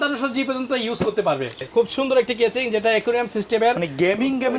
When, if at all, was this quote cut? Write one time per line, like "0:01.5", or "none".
0:01.7